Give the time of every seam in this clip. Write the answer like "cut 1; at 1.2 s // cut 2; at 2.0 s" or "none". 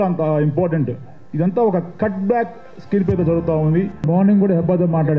cut 1; at 4.0 s